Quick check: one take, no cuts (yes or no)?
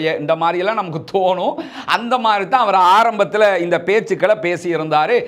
yes